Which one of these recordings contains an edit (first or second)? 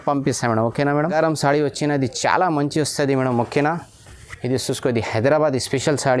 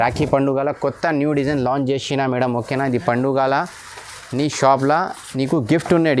first